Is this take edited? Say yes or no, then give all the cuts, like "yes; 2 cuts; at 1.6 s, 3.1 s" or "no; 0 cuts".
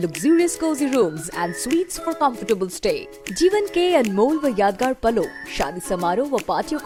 no; 0 cuts